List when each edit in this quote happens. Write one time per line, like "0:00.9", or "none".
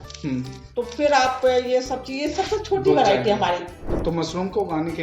0:03.9